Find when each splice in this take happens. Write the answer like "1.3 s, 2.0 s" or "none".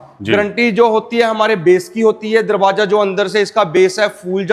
none